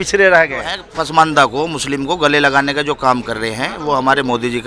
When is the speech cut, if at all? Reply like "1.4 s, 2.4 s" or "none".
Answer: 0.9 s